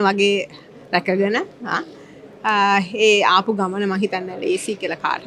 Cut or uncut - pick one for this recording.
uncut